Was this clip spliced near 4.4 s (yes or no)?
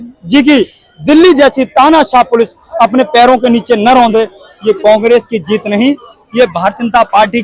yes